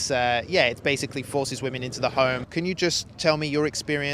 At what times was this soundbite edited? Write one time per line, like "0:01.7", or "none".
0:02.4